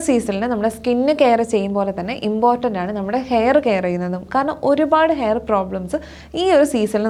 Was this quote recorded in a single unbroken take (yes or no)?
yes